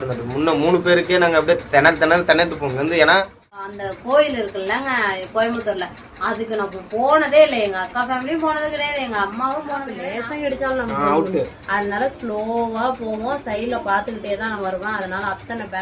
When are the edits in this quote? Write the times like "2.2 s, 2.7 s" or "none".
3.8 s, 10.0 s